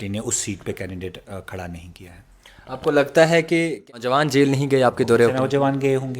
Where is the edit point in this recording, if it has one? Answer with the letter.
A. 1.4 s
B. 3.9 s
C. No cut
B